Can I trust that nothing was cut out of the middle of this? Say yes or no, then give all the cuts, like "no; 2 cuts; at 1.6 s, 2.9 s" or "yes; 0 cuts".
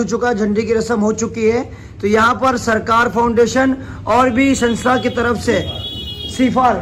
yes; 0 cuts